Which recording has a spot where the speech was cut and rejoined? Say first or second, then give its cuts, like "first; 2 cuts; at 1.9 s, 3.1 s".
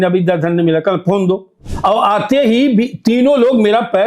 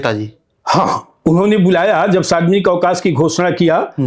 first; 1 cut; at 1.5 s